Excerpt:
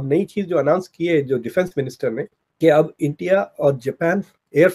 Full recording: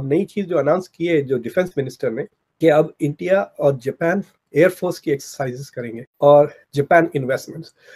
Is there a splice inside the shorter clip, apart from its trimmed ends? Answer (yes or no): no